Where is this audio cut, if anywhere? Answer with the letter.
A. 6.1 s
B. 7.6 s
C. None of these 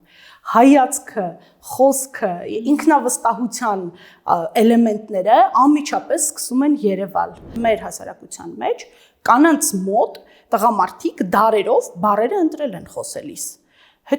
B